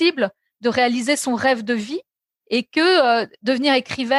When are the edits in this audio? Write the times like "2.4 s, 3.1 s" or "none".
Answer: none